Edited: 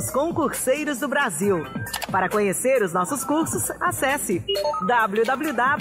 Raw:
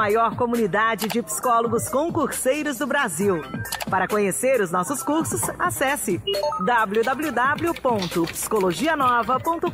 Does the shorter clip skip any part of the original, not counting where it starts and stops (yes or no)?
no